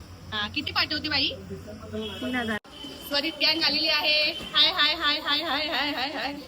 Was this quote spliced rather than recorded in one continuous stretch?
yes; 1 cut; at 2.6 s

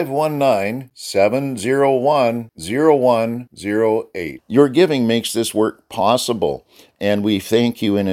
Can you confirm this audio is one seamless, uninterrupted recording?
yes; 0 cuts

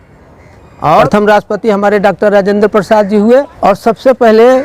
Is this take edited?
yes; 2 cuts; at 1.1 s, 3.5 s

